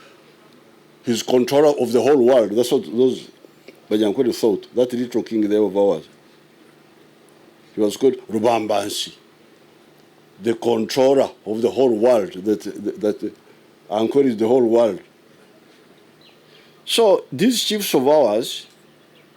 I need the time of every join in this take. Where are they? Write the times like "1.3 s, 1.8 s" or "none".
16.2 s